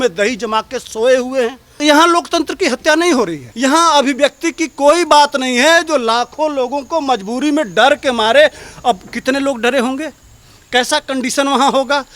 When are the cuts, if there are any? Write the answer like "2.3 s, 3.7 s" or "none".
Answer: 1.7 s, 3.4 s